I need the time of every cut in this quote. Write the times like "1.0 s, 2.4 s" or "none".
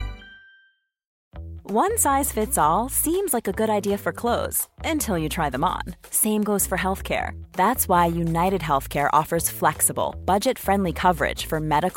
1.1 s